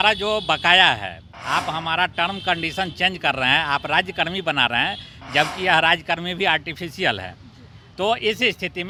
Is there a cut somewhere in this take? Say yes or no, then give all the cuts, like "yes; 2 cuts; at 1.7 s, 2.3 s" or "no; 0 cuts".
no; 0 cuts